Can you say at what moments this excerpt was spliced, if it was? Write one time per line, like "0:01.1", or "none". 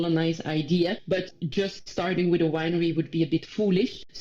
0:01.4